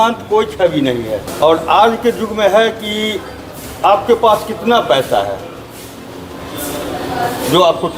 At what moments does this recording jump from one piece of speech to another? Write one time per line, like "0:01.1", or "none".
0:01.2